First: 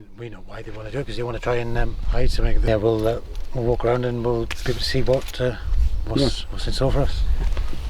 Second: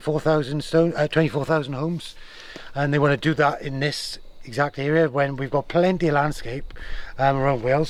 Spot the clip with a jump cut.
first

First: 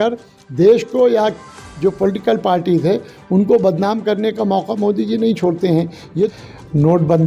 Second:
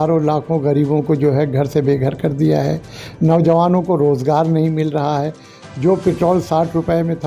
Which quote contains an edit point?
first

